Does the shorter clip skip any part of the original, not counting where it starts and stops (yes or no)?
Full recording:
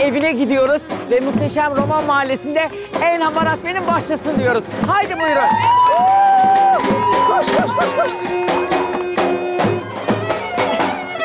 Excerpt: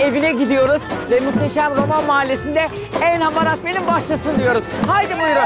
no